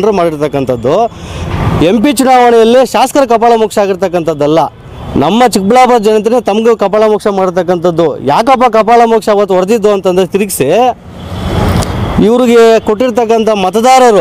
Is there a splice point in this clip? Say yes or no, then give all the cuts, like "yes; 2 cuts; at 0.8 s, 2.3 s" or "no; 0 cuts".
no; 0 cuts